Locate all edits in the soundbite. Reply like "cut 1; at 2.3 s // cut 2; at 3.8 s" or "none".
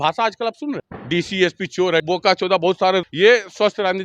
cut 1; at 0.9 s // cut 2; at 2.0 s // cut 3; at 3.1 s